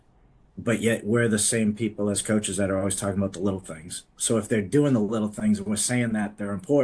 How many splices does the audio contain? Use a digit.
0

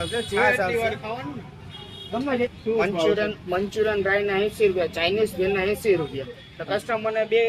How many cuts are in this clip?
1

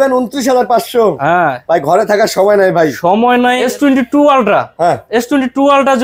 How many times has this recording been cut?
1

